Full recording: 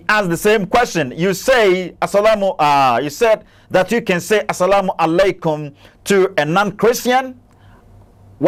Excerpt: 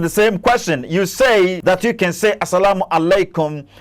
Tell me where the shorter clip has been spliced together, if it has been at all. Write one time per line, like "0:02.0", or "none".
0:01.6